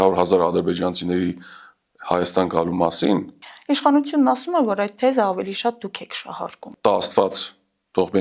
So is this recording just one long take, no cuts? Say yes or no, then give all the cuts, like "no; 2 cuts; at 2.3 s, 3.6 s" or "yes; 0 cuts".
no; 2 cuts; at 3.4 s, 6.7 s